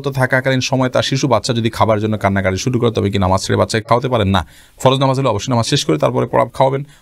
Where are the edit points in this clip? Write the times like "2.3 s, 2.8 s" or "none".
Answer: none